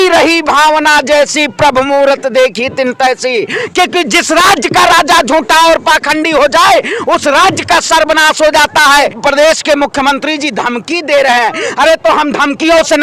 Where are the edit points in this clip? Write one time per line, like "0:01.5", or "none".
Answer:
0:03.6
0:09.1